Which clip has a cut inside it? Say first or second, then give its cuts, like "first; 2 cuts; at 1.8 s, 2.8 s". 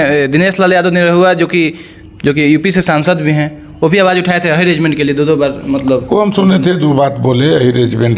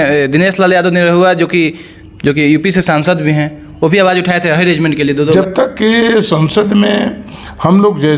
second; 1 cut; at 5.3 s